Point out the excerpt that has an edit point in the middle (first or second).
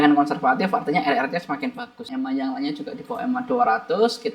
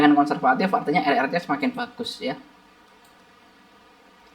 first